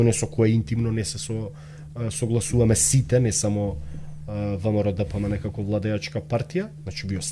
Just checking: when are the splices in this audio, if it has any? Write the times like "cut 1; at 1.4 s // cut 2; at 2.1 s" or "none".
none